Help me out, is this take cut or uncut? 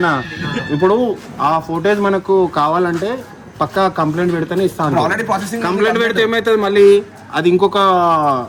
uncut